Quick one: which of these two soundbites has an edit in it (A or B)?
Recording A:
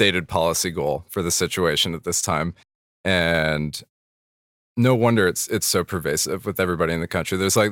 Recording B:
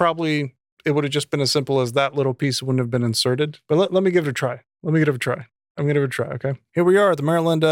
B